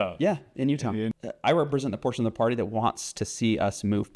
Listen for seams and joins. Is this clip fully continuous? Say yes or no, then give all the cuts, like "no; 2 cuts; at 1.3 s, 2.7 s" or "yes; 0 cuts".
no; 1 cut; at 1.1 s